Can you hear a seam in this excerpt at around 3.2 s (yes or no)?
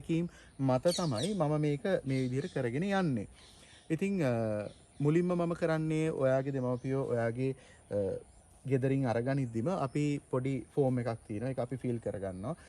no